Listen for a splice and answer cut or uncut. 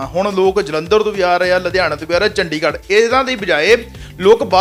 uncut